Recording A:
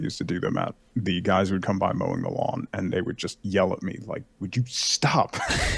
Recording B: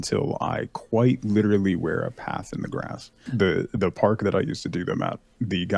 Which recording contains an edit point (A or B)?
B